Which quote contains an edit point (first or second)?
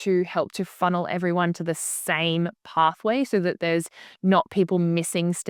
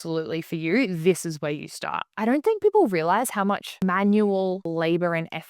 second